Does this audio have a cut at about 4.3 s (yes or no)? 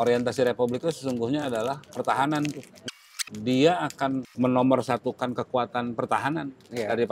yes